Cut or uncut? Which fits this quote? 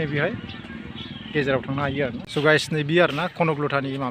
cut